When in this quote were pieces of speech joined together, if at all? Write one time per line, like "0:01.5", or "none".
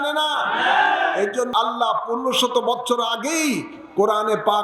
0:01.5